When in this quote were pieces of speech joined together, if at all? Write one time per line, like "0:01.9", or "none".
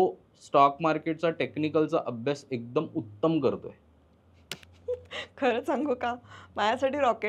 none